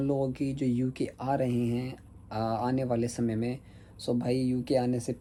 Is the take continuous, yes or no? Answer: yes